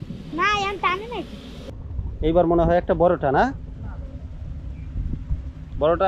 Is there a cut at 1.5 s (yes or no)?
yes